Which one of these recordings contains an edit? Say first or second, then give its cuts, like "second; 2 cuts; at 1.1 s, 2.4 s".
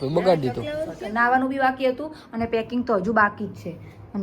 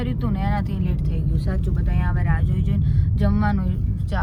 first; 1 cut; at 1.0 s